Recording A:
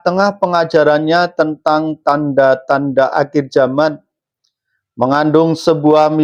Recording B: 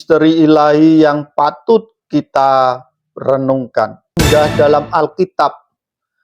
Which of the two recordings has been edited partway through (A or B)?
B